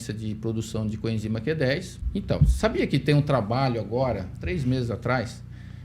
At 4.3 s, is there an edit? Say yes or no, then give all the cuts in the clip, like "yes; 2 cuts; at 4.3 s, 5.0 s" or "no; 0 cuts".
yes; 2 cuts; at 2.0 s, 4.3 s